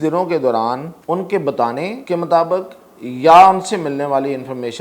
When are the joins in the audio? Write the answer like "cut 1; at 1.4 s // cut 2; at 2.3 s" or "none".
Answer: cut 1; at 0.9 s // cut 2; at 2.0 s

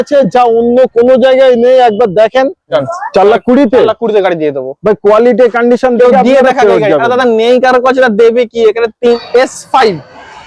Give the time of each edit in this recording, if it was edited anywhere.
cut 1; at 2.8 s // cut 2; at 9.2 s

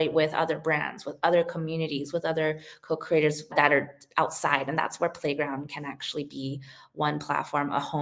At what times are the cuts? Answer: none

